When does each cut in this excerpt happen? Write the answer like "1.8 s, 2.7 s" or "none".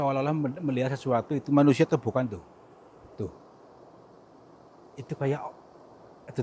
none